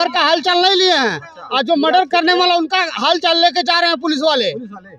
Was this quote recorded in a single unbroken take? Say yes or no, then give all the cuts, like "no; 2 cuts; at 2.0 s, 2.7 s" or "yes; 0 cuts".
yes; 0 cuts